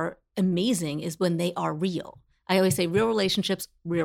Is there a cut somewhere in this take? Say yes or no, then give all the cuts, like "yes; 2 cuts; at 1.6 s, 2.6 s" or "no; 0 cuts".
no; 0 cuts